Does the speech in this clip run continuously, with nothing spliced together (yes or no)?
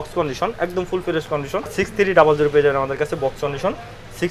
no